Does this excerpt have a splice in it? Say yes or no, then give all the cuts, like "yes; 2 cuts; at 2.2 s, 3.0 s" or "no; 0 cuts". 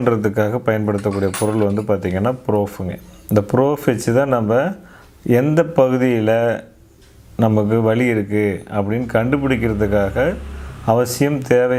no; 0 cuts